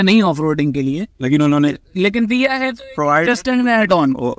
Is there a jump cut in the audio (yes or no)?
no